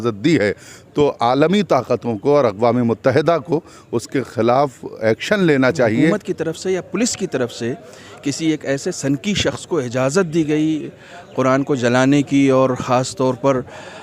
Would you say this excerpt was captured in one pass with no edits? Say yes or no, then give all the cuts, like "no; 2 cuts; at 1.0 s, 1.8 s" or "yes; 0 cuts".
no; 1 cut; at 6.2 s